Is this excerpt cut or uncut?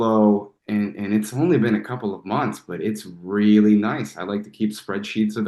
uncut